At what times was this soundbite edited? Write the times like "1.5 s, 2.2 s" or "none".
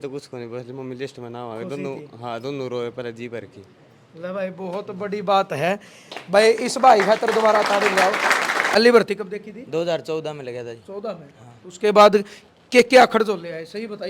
8.8 s